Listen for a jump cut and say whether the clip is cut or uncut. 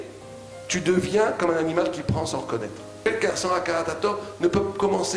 cut